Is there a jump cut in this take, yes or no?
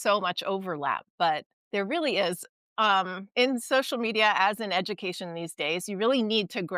yes